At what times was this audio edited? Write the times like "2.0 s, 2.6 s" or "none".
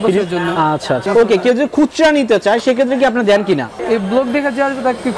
1.0 s